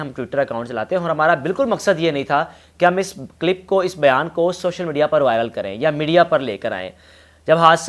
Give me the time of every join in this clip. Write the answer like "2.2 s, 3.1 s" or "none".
none